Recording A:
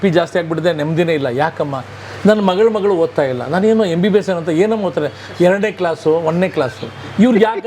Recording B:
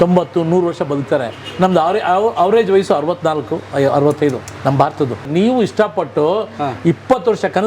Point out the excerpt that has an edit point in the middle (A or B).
B